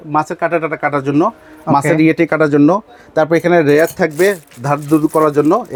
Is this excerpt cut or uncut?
uncut